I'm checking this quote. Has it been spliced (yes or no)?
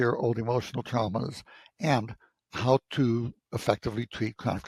no